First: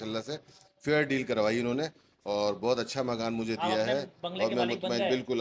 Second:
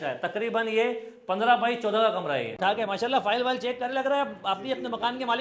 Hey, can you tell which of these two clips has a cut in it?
second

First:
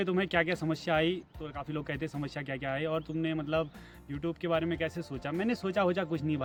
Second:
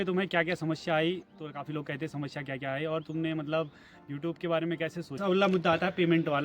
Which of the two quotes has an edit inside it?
second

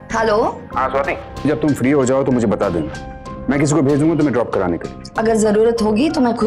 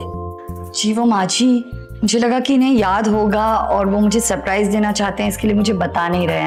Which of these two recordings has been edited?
first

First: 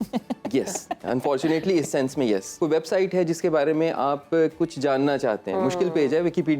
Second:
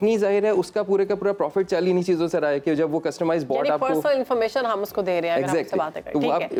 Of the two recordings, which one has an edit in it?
first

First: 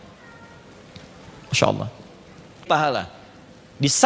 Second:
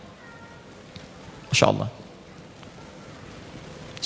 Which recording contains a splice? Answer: first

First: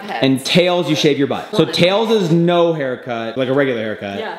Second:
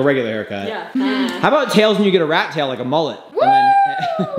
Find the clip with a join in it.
first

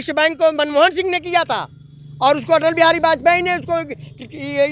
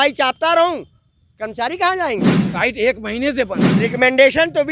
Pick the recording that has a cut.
second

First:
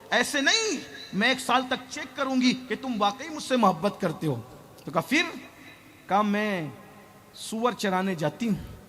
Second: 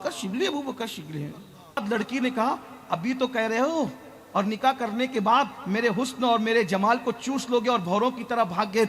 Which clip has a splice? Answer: second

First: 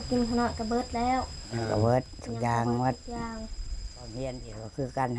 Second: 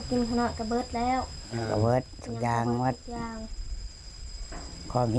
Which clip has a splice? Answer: first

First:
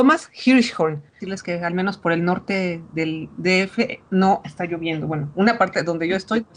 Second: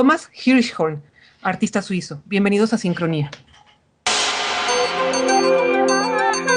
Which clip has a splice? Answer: second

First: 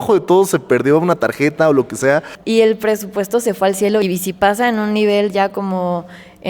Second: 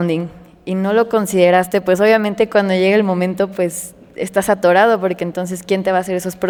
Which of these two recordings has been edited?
first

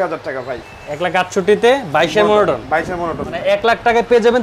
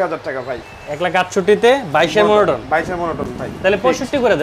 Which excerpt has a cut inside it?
first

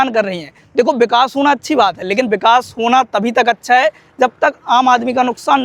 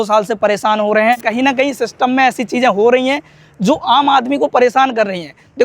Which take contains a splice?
second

